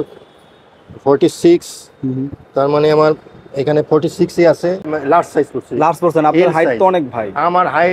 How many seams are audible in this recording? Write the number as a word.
one